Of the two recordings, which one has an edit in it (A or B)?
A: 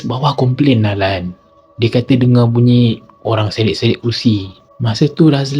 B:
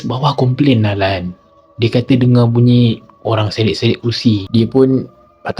B